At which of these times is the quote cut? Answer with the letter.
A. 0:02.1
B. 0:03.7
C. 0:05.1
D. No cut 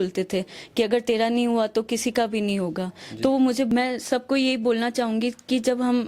B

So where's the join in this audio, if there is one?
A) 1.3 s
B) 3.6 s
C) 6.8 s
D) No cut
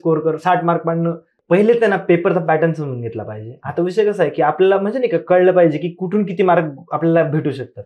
A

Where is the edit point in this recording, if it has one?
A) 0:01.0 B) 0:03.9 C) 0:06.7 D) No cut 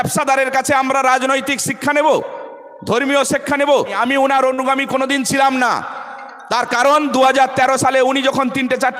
B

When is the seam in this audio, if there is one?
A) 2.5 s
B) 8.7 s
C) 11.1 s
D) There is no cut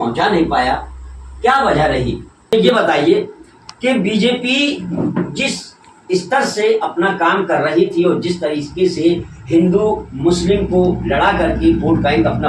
A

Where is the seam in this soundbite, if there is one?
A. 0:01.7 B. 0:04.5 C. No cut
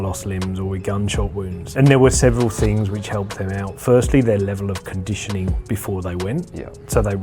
A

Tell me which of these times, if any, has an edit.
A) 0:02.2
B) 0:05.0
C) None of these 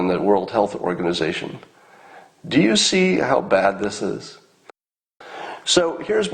B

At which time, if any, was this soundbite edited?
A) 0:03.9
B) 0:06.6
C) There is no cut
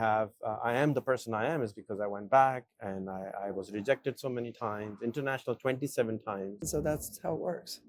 B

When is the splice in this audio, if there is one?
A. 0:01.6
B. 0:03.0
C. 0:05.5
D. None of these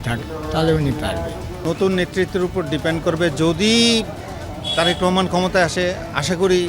A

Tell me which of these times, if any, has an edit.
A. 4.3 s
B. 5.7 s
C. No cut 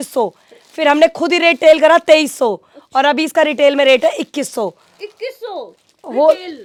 C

